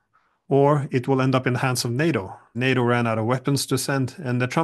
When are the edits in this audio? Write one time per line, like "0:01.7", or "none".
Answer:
0:02.4